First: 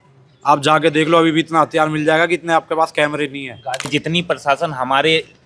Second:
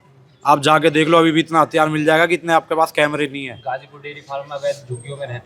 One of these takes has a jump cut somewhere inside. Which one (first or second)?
first